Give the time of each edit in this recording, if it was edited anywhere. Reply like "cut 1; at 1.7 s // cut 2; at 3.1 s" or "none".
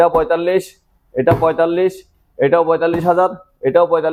none